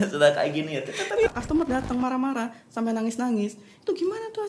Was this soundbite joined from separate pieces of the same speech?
yes; 1 cut; at 1.3 s

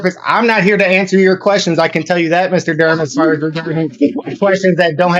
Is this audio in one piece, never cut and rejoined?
yes; 0 cuts

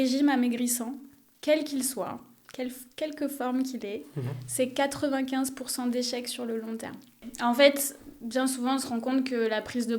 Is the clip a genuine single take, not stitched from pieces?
no; 1 cut; at 7.2 s

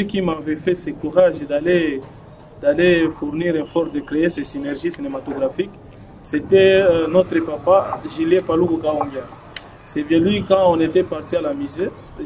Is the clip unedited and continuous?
yes; 0 cuts

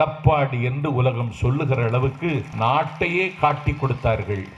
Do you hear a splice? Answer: yes; 1 cut; at 2.5 s

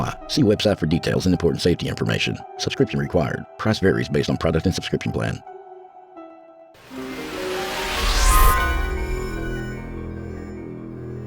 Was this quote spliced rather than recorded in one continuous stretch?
yes; 2 cuts; at 5.4 s, 6.8 s

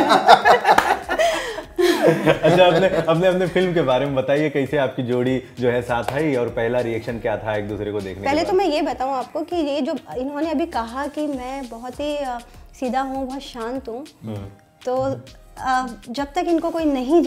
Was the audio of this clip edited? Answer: no; 0 cuts

